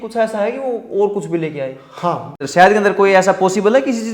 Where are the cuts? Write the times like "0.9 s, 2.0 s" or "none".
2.3 s

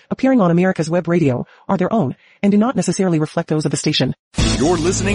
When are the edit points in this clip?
4.2 s

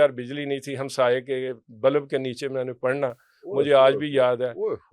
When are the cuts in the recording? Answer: none

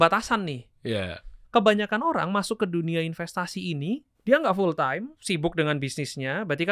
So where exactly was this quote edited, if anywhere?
1.3 s, 4.1 s, 5.1 s

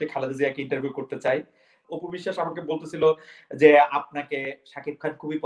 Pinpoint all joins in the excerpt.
1.9 s

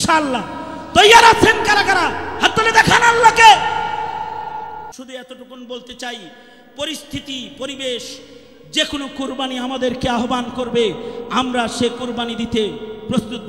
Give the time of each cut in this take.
5.0 s

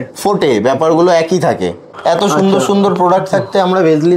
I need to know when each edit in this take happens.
1.9 s

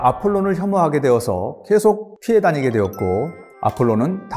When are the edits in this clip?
2.1 s, 3.4 s

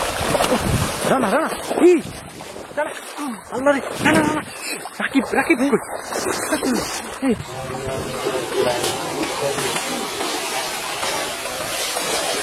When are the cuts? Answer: none

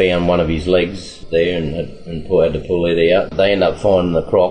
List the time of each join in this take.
1.1 s, 3.3 s

